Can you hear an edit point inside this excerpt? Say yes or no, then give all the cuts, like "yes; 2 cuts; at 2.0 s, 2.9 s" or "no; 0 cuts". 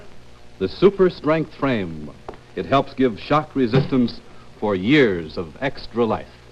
no; 0 cuts